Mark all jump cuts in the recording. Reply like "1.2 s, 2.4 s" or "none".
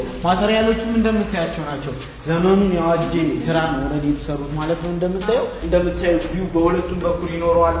5.6 s